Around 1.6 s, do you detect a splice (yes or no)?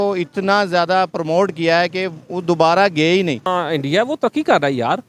no